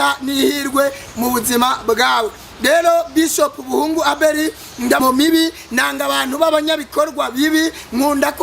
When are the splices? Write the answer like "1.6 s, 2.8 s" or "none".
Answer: 5.0 s